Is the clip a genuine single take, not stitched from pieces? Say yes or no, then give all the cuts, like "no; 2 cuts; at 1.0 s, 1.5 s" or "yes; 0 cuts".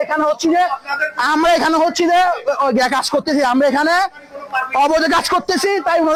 yes; 0 cuts